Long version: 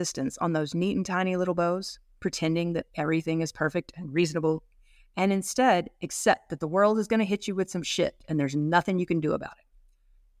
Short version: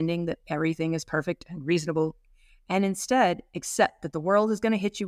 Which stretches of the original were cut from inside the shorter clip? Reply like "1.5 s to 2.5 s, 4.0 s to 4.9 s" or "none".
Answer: none